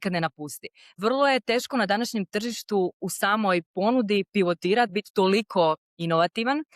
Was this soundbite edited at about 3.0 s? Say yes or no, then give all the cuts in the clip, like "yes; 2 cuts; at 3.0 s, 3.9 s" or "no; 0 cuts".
no; 1 cut; at 0.9 s